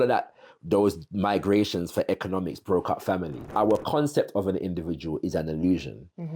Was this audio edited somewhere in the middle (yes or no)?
yes